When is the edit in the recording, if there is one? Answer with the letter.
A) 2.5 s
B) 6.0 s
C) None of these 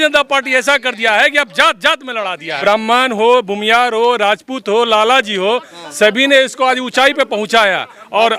A